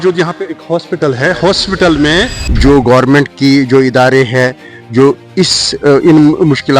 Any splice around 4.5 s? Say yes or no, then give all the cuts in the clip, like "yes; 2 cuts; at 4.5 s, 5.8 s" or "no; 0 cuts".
no; 1 cut; at 2.4 s